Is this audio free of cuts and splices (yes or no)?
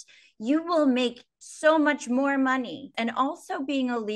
no